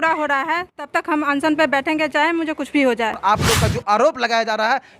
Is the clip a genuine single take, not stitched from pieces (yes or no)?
no